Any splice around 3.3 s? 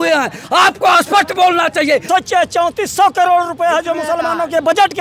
no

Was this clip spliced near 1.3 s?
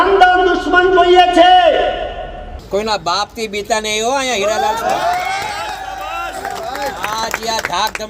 no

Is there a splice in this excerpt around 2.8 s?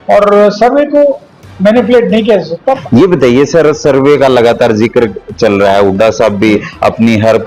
yes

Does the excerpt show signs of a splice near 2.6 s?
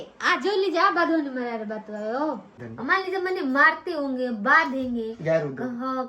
yes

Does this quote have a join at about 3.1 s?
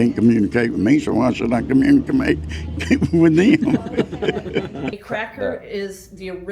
no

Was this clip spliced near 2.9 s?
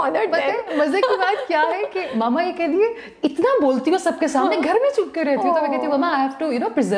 no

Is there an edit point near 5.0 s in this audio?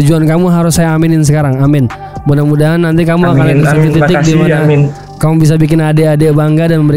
no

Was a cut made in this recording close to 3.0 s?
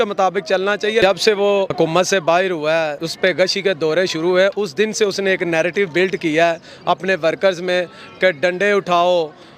yes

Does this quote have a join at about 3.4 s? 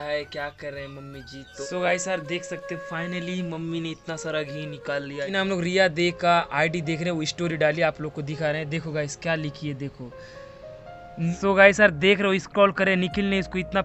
no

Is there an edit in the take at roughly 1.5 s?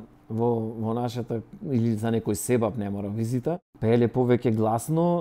no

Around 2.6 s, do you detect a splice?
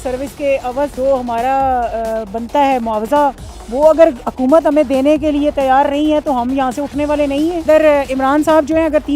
no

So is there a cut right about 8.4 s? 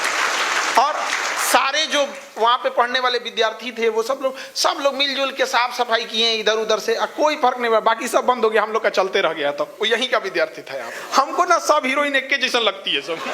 no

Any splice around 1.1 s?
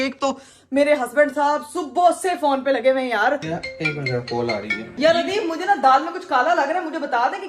no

